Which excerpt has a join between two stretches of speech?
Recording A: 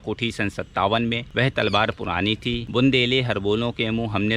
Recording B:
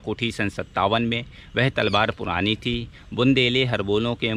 A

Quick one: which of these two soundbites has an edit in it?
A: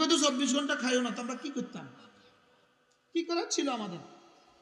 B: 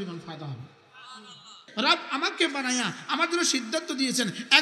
B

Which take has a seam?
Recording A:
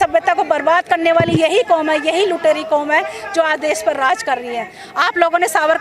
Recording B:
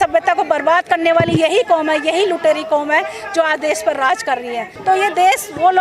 B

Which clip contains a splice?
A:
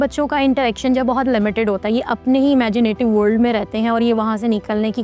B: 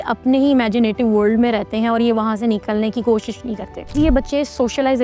B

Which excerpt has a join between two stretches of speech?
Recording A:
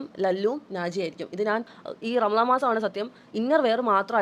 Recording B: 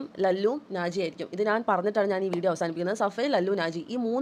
A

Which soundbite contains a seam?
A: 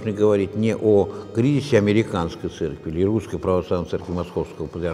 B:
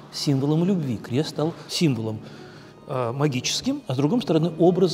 B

